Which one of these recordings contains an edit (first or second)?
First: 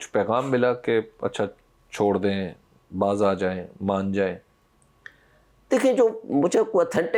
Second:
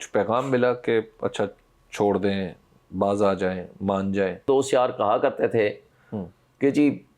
second